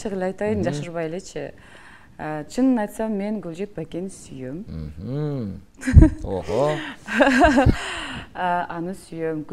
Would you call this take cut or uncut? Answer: uncut